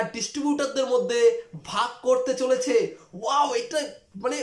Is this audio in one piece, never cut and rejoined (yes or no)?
yes